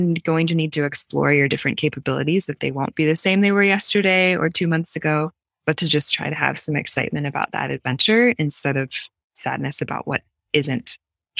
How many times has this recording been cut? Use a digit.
0